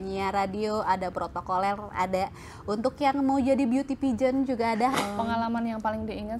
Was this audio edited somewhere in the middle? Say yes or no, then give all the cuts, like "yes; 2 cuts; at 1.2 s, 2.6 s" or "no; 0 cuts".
yes; 1 cut; at 4.9 s